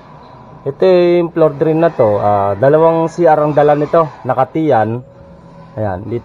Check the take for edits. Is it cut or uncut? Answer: uncut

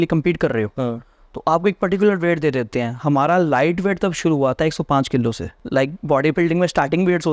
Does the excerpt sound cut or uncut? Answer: cut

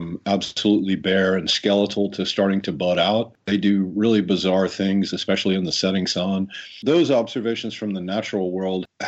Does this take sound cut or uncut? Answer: cut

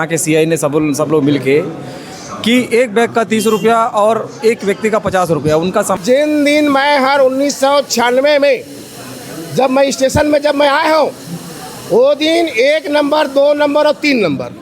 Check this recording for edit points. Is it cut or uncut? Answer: cut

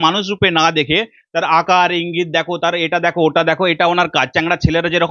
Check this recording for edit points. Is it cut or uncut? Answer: uncut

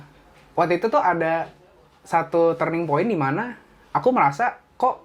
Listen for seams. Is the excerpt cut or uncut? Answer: uncut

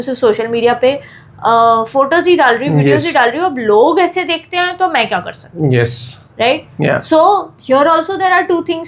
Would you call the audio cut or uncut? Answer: uncut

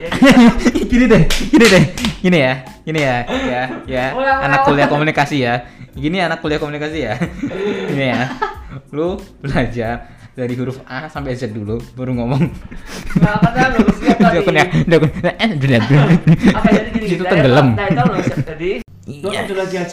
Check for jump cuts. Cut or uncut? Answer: cut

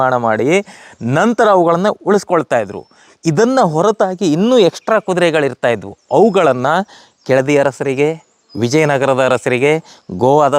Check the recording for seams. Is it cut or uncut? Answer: uncut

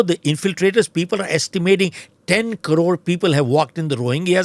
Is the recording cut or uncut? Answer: uncut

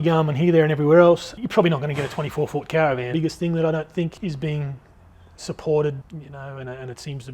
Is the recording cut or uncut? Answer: cut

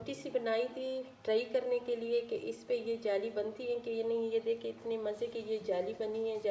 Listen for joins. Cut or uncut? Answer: uncut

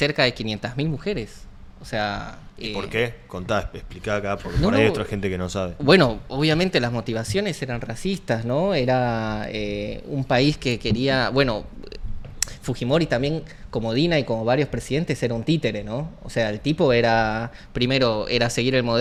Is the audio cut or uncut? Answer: uncut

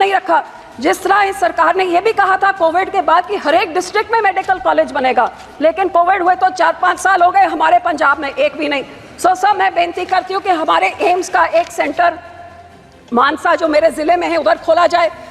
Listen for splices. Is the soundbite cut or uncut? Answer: uncut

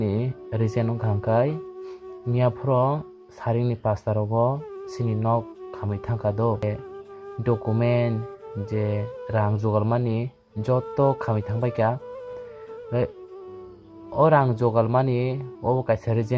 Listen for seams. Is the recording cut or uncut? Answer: cut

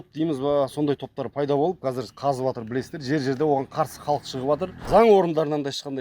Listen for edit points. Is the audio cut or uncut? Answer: cut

